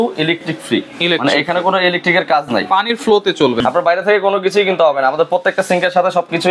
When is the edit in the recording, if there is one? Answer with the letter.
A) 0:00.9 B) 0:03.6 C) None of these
B